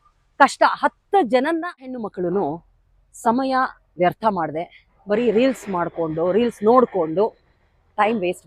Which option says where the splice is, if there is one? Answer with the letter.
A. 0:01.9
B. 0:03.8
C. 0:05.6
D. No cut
A